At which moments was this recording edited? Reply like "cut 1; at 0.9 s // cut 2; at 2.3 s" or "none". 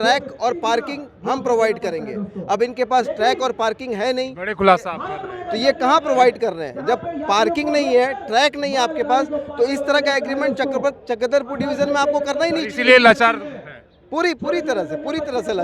none